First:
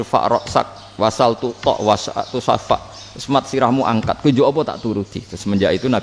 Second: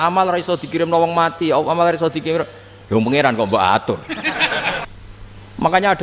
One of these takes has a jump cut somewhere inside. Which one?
second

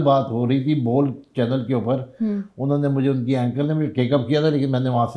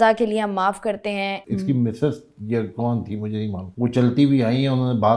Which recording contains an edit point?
second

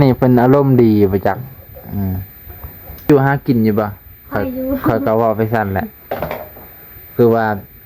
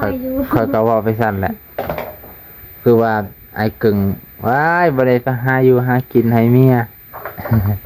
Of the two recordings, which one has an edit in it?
first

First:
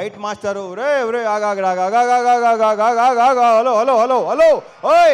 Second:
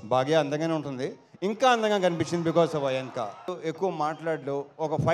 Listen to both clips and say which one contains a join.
second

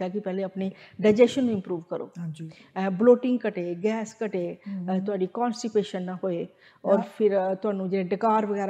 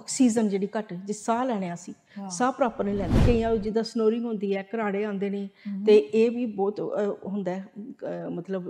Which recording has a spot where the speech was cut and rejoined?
second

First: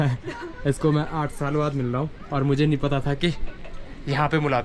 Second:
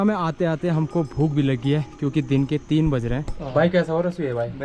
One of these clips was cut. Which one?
second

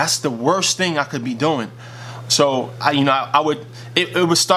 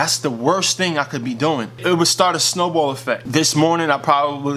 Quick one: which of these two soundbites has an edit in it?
second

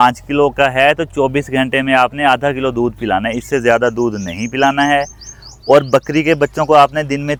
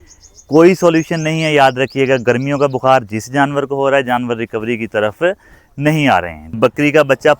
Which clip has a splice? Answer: second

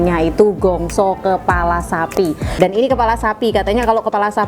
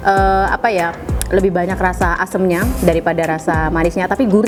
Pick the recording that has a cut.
first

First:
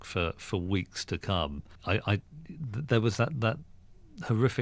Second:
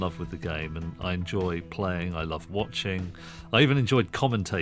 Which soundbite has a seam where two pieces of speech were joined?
first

